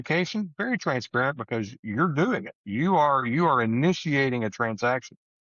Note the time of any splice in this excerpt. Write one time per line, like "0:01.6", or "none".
0:01.8